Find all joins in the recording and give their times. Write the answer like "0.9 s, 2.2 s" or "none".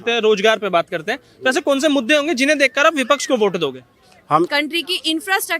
4.5 s